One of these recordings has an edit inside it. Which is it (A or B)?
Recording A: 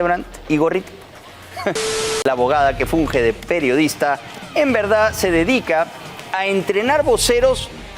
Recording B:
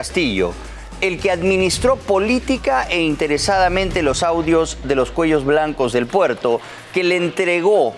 A